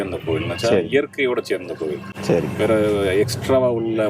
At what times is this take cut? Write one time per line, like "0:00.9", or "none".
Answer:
none